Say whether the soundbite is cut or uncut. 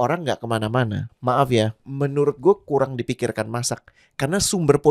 cut